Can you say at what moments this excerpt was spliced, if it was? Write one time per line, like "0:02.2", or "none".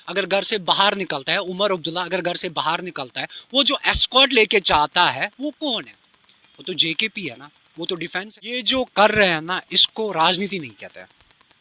0:08.6

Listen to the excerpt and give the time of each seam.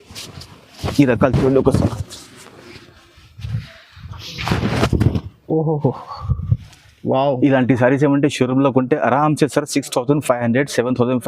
0:04.3

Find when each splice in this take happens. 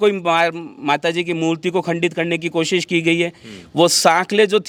none

